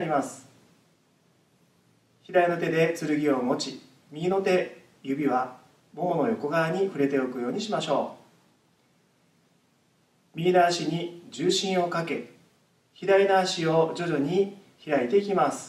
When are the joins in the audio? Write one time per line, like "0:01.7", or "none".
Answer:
none